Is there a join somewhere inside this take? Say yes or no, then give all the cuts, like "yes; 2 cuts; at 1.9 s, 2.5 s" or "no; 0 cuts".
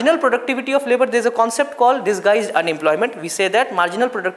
no; 0 cuts